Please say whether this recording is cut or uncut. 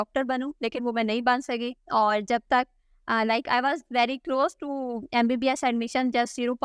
uncut